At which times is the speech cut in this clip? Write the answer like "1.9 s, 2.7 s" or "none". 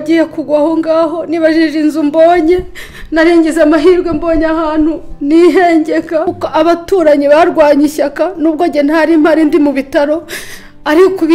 6.3 s

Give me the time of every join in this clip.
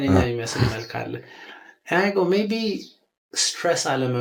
none

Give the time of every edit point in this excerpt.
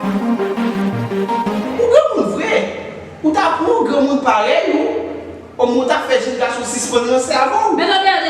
1.5 s

